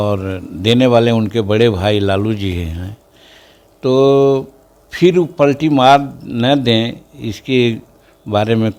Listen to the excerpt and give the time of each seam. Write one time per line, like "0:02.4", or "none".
none